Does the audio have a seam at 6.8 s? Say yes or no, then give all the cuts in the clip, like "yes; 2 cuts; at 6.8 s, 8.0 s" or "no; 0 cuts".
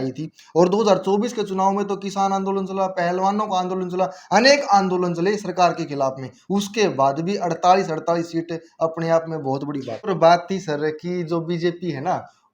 no; 1 cut; at 9.9 s